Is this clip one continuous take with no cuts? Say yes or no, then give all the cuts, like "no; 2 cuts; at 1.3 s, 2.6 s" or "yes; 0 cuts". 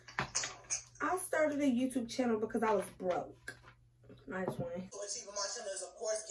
no; 1 cut; at 4.8 s